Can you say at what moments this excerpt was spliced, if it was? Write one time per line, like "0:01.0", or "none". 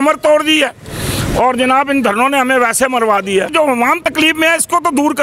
0:03.9